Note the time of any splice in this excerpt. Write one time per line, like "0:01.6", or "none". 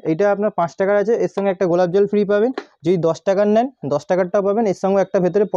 none